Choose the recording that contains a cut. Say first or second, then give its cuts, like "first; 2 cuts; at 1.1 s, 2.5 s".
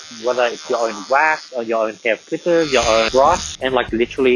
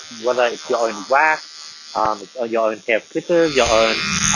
first; 2 cuts; at 1.5 s, 3.3 s